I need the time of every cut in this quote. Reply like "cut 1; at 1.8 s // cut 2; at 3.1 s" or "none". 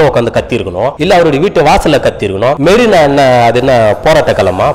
cut 1; at 1.0 s // cut 2; at 2.6 s